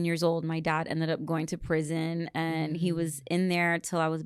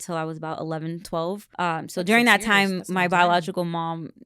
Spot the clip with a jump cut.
second; 1 cut; at 1.5 s

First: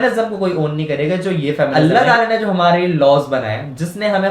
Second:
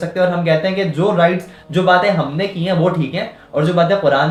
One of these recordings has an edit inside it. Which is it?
first; 1 cut; at 1.7 s

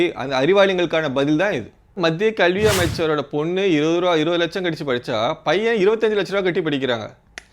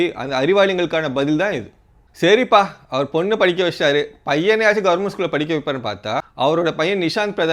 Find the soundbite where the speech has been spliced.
first; 1 cut; at 2.0 s

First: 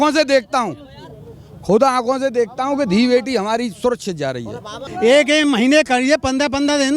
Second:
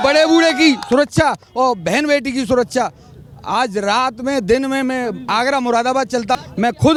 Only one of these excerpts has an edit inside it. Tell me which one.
first; 1 cut; at 4.8 s

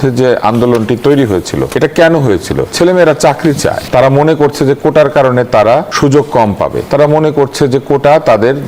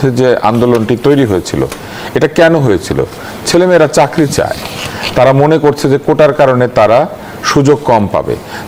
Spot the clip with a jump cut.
first; 5 cuts; at 1.7 s, 2.7 s, 3.8 s, 5.9 s, 6.8 s

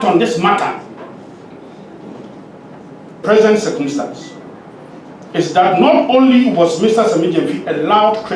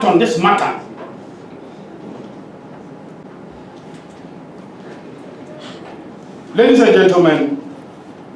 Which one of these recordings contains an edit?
first; 1 cut; at 3.2 s

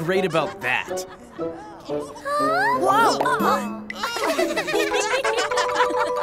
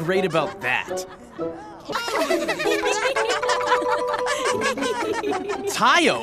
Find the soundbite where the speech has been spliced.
second; 1 cut; at 1.8 s

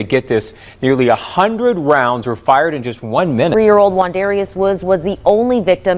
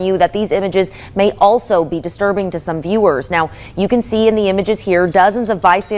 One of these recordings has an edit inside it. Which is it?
first; 1 cut; at 3.5 s

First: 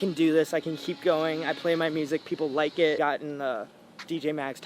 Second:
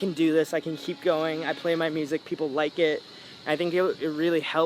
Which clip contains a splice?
first; 1 cut; at 3.0 s

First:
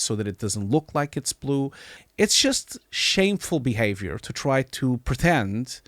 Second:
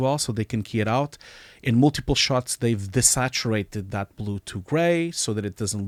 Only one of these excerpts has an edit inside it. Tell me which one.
first; 1 cut; at 1.9 s

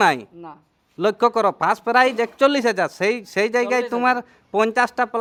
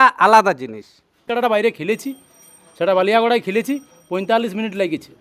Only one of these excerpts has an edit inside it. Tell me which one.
second; 1 cut; at 1.3 s

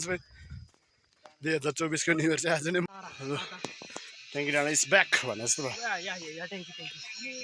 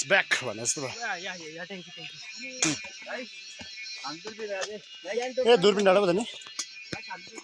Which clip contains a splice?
first; 1 cut; at 2.9 s

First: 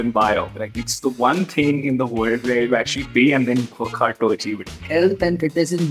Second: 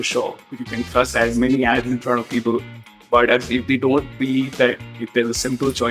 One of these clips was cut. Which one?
first; 1 cut; at 4.8 s

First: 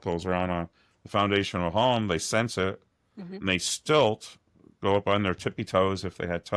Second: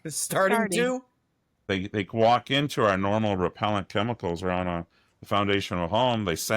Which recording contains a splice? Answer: second; 1 cut; at 1.6 s

